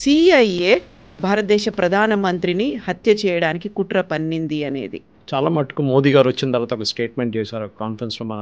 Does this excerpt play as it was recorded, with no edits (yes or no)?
no